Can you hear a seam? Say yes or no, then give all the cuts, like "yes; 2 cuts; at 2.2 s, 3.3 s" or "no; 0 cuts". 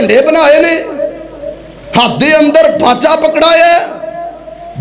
no; 0 cuts